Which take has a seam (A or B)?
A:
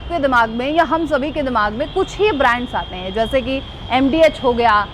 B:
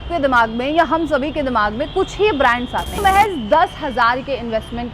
B